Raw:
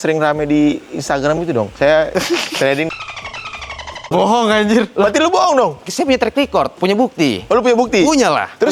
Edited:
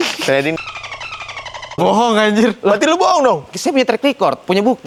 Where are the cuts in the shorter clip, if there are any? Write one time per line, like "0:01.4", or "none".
none